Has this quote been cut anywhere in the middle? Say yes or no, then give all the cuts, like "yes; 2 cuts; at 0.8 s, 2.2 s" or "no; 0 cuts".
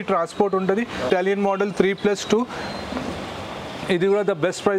yes; 1 cut; at 1.1 s